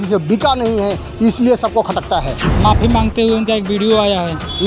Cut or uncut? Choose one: cut